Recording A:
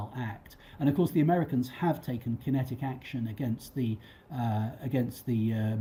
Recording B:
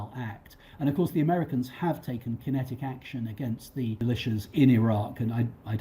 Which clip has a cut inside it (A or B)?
B